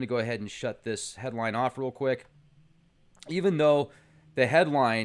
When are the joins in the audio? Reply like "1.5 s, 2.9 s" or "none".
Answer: 3.8 s